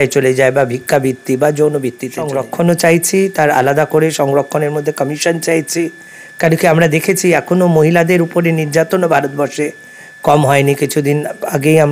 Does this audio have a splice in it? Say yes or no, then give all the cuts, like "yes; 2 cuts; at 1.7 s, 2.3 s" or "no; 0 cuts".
yes; 1 cut; at 2.4 s